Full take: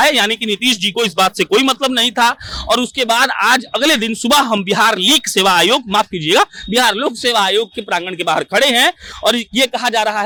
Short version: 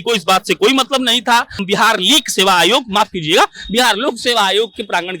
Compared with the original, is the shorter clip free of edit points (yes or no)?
no